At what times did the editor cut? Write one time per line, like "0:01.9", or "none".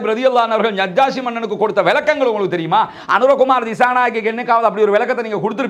none